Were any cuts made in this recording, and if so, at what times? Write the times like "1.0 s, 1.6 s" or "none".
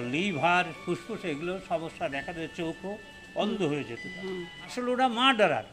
4.6 s